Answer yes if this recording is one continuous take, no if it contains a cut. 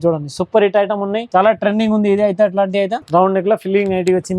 no